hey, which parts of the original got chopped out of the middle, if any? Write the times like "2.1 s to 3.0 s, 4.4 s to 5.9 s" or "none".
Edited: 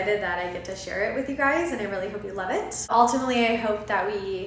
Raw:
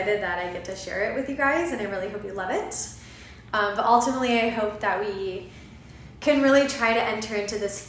2.9 s to 3.8 s